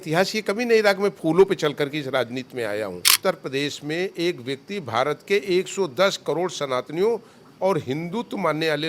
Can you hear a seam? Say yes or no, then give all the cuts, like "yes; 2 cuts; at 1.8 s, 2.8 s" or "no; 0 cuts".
yes; 1 cut; at 3.1 s